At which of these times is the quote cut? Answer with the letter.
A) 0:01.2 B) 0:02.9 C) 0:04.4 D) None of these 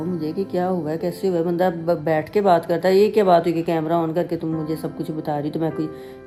D